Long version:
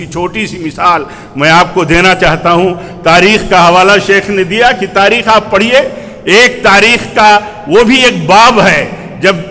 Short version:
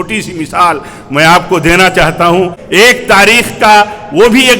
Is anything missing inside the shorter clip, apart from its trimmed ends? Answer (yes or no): yes